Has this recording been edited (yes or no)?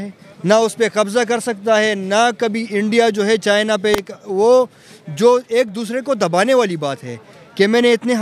no